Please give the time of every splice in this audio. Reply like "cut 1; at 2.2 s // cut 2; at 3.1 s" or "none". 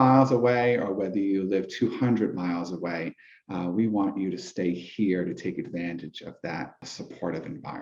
cut 1; at 6.9 s